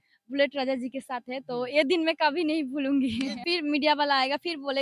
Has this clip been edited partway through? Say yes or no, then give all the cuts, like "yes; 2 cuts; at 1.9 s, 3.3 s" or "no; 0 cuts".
yes; 1 cut; at 3.4 s